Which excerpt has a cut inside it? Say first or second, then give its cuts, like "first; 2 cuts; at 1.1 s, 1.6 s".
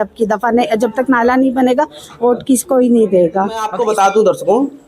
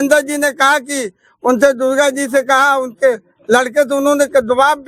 first; 1 cut; at 3.7 s